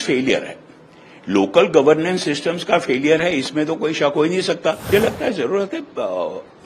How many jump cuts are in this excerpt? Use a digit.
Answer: 1